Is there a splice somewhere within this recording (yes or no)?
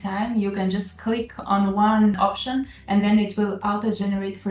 no